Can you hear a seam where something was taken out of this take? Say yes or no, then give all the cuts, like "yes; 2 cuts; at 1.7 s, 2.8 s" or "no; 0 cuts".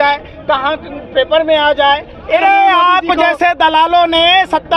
yes; 1 cut; at 2.4 s